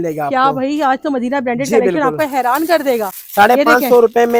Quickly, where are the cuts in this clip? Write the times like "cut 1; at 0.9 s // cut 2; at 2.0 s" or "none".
none